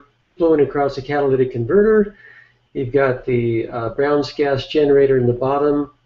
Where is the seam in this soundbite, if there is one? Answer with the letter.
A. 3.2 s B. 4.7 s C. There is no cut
A